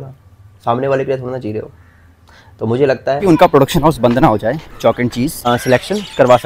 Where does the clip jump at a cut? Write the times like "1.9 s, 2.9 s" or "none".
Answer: 3.2 s, 5.4 s

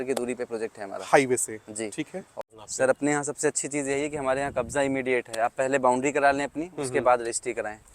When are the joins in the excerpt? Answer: 2.2 s

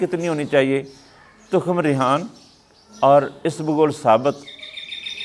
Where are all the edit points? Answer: none

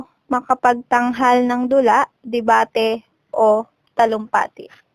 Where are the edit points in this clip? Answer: 3.8 s

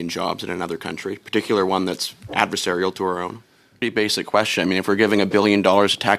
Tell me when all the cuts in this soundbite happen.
3.8 s

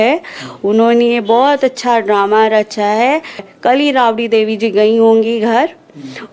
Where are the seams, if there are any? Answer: 3.5 s

